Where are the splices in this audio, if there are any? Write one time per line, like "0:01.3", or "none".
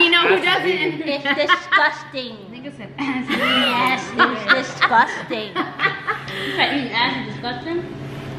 none